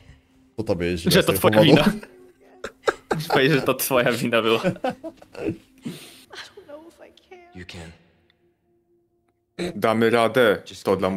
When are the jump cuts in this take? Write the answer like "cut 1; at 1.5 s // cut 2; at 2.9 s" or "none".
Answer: cut 1; at 6.2 s